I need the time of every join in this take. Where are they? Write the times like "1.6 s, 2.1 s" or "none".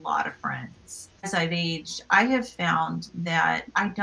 1.3 s